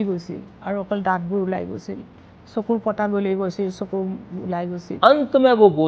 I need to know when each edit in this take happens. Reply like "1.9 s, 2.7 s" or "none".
4.9 s